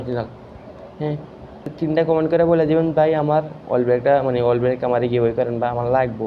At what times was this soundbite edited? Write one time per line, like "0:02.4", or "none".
0:01.7

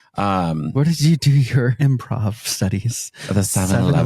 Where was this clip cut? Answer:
0:01.8

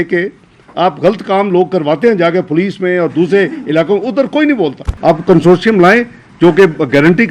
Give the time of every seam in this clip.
0:04.9

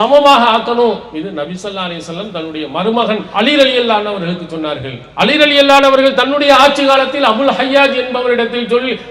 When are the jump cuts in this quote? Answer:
0:01.1
0:03.3
0:05.0

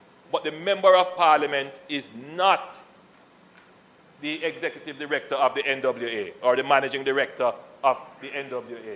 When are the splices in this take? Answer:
none

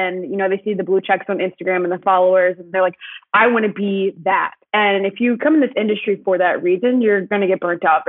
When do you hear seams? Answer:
0:02.7
0:05.0
0:07.3

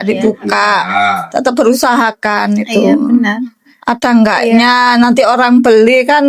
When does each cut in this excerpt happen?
none

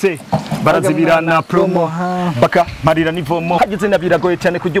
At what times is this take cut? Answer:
0:03.6

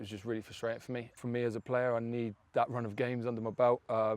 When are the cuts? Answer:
0:01.2

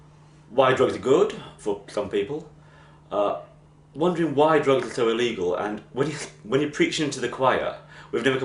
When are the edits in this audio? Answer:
0:02.3

